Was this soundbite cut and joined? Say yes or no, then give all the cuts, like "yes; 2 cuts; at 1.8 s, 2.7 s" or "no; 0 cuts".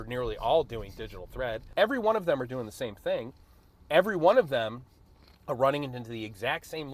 yes; 1 cut; at 1.7 s